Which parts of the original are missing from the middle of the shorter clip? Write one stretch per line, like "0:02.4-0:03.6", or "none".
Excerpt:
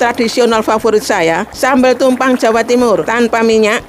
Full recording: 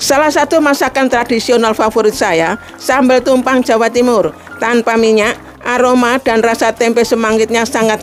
0:02.6-0:02.8
0:04.3-0:04.6